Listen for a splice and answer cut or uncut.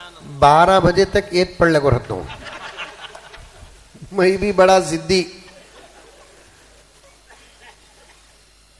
uncut